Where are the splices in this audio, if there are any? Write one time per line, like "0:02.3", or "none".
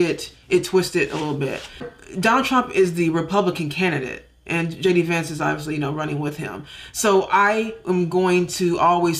none